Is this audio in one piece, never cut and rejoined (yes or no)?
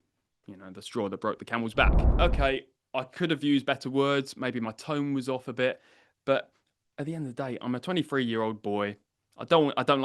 no